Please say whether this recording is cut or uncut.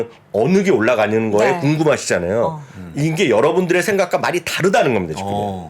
uncut